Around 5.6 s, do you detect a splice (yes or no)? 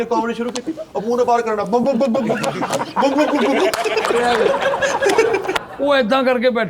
yes